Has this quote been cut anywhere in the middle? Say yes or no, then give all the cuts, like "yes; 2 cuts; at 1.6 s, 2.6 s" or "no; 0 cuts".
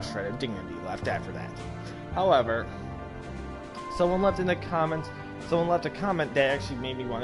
yes; 1 cut; at 2.6 s